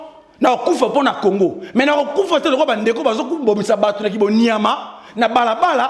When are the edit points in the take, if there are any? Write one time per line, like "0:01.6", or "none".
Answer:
none